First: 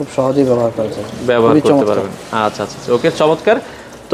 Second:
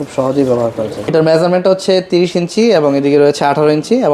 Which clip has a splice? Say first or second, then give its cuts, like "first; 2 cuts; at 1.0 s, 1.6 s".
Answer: second; 1 cut; at 1.1 s